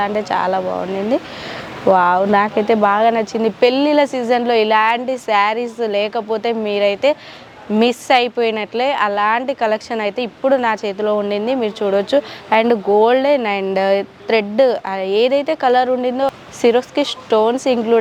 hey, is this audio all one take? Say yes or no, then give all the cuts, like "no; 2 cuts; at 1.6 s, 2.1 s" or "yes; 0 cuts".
yes; 0 cuts